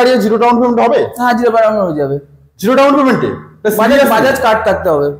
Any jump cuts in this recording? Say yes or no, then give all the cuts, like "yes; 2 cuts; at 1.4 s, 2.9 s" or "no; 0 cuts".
no; 0 cuts